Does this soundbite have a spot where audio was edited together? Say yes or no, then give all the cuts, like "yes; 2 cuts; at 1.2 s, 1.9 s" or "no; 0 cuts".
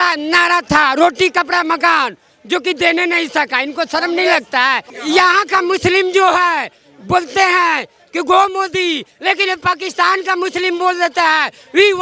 yes; 1 cut; at 4.9 s